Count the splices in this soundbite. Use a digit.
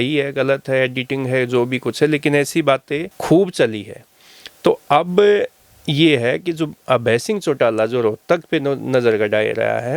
0